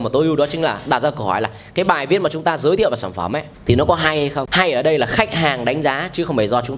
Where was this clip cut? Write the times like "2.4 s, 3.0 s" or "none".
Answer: 3.5 s, 4.5 s